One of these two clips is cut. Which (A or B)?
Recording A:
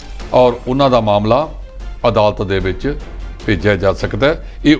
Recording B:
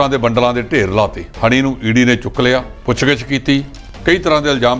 B